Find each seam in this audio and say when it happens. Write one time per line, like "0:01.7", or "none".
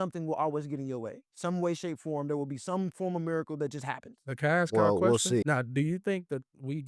0:04.2
0:05.4